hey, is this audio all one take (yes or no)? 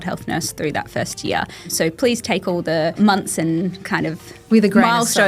no